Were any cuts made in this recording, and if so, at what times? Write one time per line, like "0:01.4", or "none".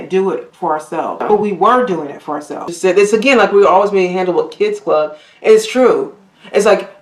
0:01.2
0:02.7